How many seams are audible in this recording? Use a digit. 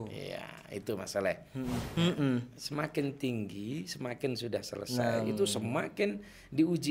1